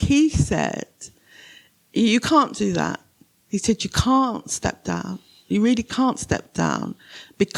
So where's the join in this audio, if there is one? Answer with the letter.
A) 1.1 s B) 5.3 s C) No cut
C